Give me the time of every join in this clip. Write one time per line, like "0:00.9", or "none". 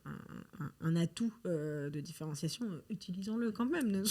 none